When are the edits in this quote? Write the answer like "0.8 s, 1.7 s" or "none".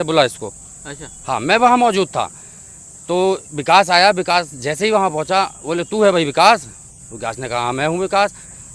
none